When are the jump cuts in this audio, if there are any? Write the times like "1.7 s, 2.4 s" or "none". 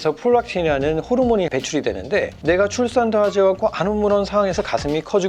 none